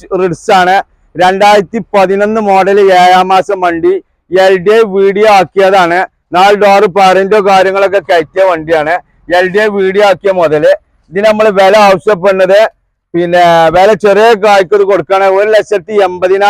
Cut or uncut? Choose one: uncut